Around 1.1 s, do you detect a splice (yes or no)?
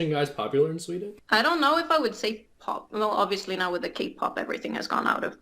yes